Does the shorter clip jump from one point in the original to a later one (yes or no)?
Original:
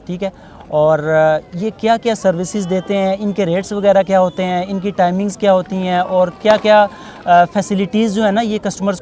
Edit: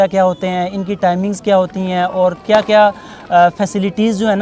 no